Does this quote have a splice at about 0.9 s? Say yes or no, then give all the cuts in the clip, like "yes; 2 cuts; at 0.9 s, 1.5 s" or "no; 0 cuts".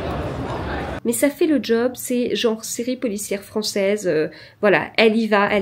yes; 1 cut; at 0.9 s